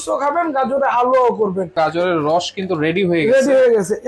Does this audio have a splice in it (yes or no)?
yes